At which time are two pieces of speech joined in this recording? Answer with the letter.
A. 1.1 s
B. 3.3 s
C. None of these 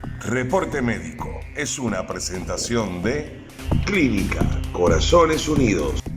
A